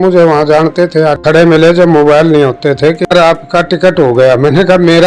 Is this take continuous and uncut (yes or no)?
no